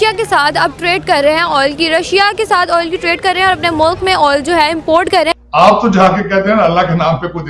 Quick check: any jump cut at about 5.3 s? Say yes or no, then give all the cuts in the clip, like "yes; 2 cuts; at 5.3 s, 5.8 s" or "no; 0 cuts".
yes; 1 cut; at 5.3 s